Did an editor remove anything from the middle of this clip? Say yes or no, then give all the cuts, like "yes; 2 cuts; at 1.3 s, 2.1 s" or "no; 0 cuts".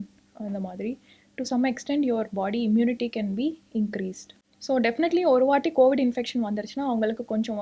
yes; 1 cut; at 4.4 s